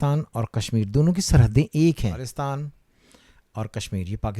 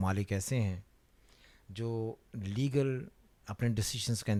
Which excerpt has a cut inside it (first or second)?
first